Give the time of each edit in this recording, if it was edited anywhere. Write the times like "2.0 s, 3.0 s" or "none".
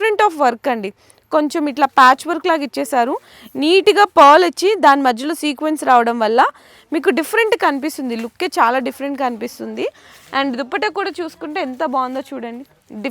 none